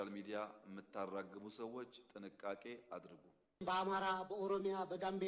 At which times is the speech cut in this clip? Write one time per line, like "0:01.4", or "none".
0:03.6